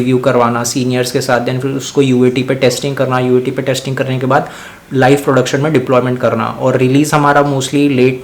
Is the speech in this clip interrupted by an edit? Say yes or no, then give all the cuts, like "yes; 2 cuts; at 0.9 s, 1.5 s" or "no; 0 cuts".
no; 0 cuts